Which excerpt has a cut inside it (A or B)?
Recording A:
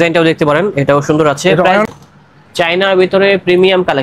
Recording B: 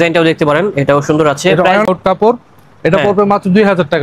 A